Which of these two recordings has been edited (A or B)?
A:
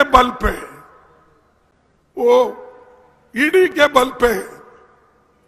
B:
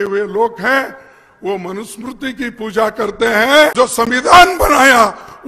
B